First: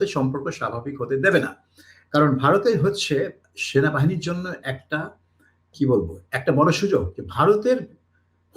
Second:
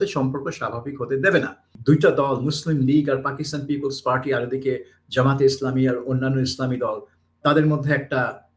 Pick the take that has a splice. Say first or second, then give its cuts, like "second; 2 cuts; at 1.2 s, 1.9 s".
second; 1 cut; at 1.7 s